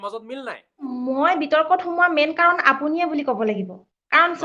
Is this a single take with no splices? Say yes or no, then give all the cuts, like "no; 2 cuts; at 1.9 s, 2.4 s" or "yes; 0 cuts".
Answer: no; 1 cut; at 0.9 s